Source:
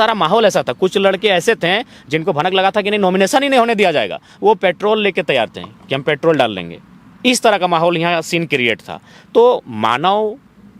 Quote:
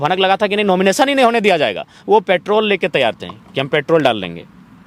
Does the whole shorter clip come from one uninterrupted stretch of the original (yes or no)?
yes